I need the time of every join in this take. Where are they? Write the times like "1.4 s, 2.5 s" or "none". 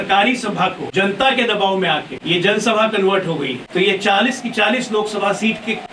0.8 s, 2.1 s, 3.6 s

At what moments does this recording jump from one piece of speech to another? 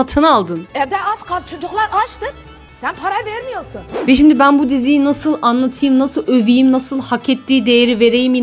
4.0 s

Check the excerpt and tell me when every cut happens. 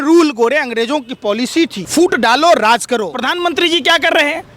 1.8 s, 3.1 s

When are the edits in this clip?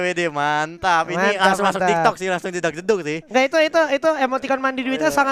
none

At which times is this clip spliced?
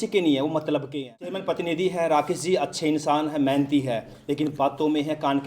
1.4 s

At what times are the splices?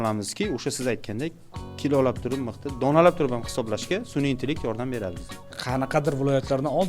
5.6 s

